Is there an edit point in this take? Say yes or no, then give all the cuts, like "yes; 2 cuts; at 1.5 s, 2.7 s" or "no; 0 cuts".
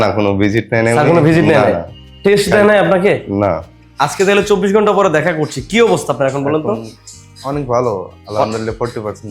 yes; 1 cut; at 3.7 s